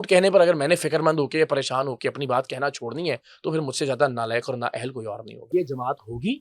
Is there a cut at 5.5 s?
yes; 1 cut; at 5.5 s

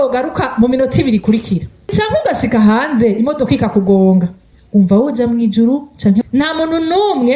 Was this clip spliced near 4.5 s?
yes; 3 cuts; at 1.9 s, 4.5 s, 6.2 s

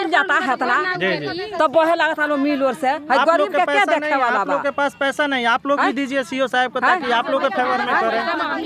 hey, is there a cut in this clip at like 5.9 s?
no; 0 cuts

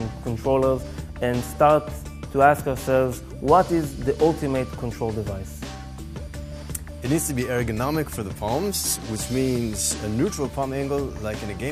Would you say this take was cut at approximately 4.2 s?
yes; 1 cut; at 4.2 s

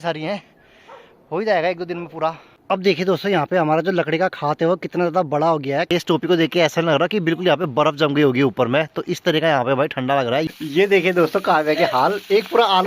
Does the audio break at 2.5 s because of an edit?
yes; 3 cuts; at 2.5 s, 5.9 s, 10.5 s

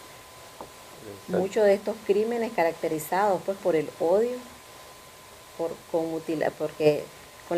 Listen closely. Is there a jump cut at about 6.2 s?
no; 1 cut; at 3.3 s

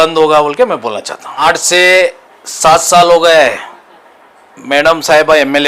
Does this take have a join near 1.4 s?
yes; 1 cut; at 1.4 s

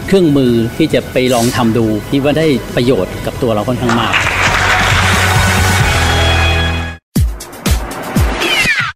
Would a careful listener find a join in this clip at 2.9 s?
no; 1 cut; at 7.0 s

